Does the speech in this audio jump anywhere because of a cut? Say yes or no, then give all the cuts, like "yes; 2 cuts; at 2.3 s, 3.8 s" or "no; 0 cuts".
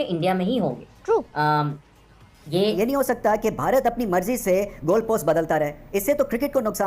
yes; 1 cut; at 2.8 s